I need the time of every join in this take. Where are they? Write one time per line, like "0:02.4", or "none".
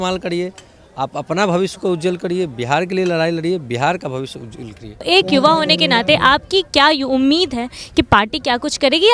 0:05.0